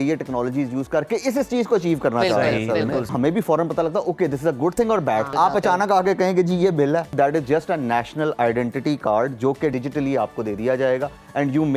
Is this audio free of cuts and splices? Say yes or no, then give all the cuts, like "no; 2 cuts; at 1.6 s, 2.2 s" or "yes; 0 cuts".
no; 4 cuts; at 3.1 s, 5.3 s, 7.1 s, 9.7 s